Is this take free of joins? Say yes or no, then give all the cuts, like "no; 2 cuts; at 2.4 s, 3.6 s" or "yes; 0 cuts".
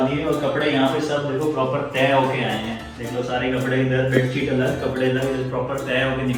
yes; 0 cuts